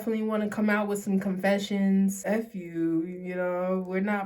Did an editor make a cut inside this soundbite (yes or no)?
yes